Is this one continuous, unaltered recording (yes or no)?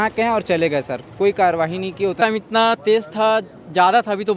no